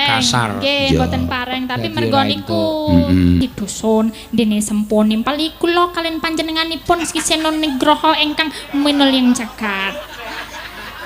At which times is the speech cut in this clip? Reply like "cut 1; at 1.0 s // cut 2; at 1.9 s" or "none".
cut 1; at 3.4 s